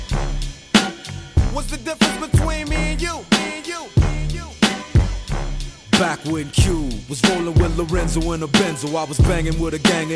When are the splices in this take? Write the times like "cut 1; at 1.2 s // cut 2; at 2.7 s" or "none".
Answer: cut 1; at 1.3 s